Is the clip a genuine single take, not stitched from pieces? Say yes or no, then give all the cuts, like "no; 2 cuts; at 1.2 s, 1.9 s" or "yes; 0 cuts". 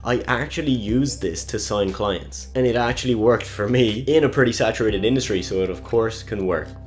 yes; 0 cuts